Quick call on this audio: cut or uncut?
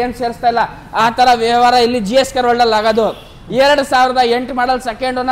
uncut